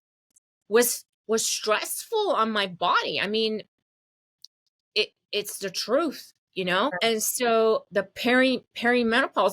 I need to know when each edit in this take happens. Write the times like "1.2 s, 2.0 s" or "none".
7.0 s